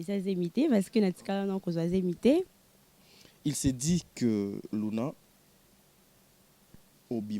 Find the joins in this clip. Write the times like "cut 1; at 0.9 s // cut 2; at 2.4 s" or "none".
cut 1; at 2.6 s